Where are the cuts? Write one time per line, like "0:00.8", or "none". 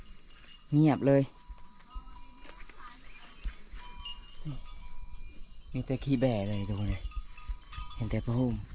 none